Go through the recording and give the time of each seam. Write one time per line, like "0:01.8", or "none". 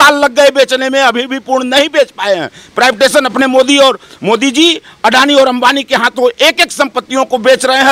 none